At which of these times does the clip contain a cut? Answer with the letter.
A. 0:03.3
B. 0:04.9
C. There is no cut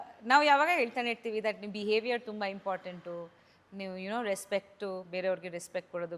C